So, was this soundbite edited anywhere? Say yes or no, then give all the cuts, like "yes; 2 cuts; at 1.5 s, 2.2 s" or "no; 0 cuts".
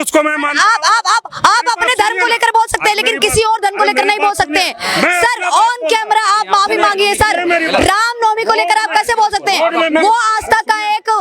no; 0 cuts